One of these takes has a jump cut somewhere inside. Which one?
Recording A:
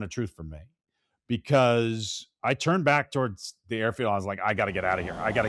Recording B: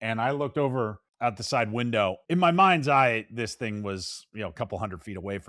B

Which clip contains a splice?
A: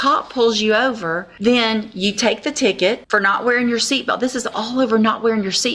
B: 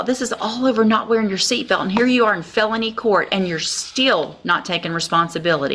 A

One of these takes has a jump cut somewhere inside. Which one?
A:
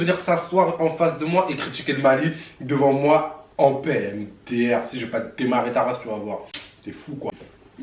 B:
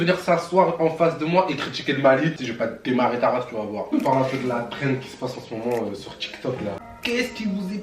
B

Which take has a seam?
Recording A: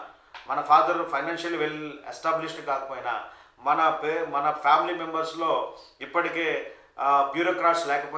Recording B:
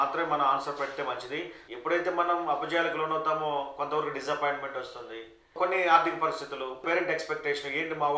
B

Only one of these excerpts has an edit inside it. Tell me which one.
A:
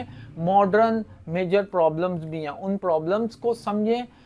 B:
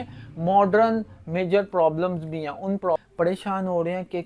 B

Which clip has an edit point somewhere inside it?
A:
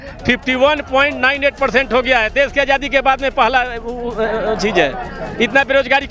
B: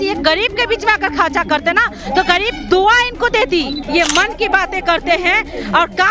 B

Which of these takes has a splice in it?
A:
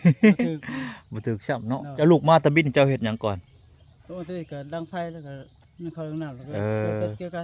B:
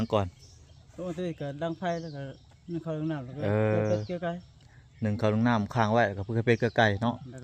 A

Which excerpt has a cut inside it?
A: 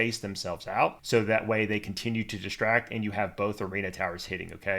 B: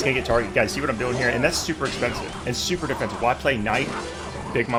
A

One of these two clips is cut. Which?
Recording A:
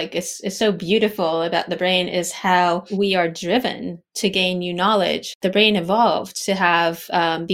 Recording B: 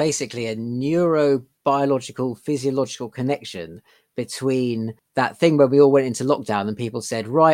A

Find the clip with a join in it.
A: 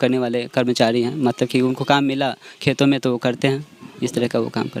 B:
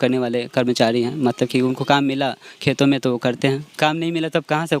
B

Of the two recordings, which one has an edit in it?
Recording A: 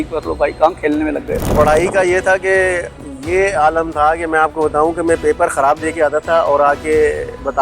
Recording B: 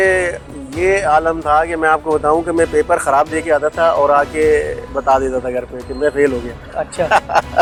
A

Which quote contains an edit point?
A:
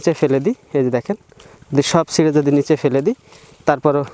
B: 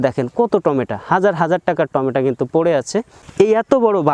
B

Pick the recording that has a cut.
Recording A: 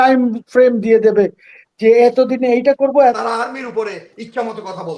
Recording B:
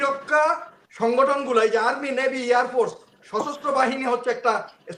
A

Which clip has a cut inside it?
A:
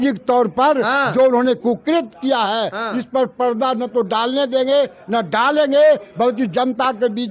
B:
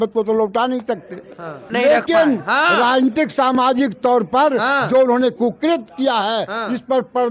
B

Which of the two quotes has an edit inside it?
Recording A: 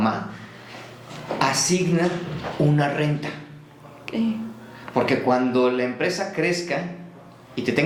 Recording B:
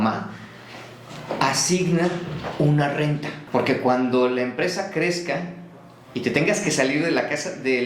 B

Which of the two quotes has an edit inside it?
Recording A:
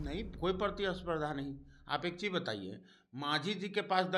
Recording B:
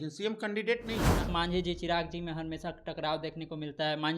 B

